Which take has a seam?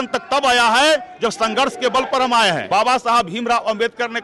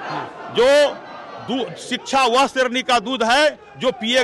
first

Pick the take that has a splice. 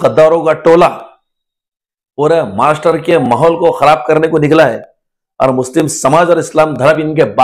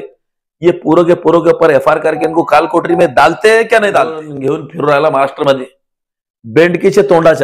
second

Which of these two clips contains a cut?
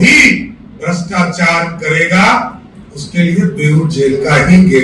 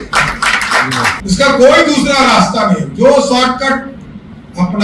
second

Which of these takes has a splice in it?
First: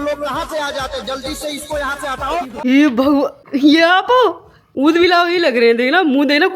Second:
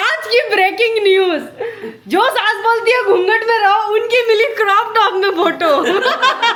first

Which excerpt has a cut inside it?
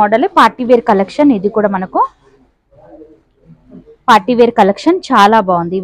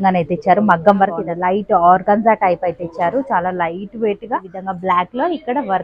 second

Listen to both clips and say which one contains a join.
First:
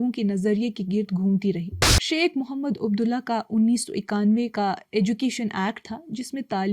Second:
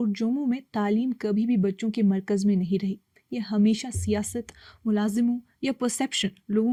first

